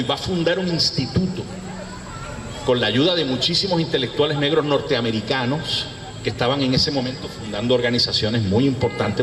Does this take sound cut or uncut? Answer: cut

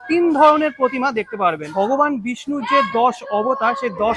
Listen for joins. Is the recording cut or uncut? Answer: cut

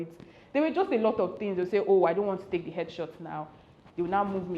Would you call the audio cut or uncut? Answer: uncut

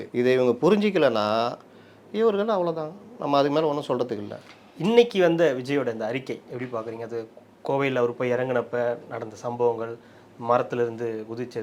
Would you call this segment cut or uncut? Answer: uncut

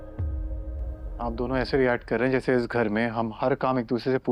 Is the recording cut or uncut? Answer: cut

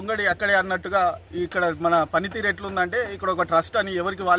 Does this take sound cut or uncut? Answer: uncut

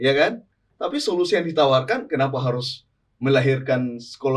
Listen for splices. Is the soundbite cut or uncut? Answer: uncut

